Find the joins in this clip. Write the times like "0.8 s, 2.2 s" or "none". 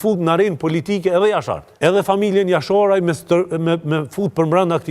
1.6 s